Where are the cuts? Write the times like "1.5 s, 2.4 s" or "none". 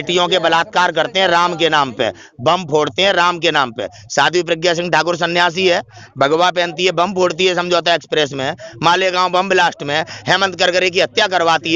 none